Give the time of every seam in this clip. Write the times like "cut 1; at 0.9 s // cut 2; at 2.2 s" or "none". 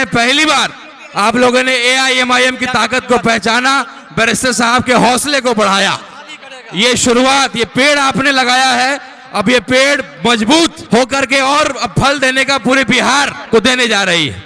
cut 1; at 10.8 s // cut 2; at 13.4 s